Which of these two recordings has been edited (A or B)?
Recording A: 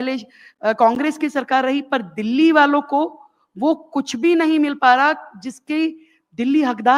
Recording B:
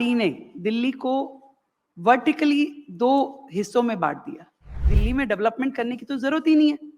B